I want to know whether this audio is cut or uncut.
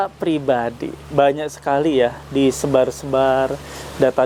uncut